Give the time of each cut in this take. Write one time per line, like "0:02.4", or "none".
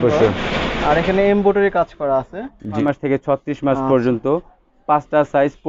0:02.7